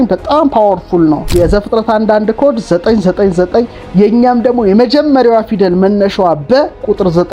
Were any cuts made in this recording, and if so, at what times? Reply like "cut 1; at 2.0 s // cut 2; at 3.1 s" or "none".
cut 1; at 1.2 s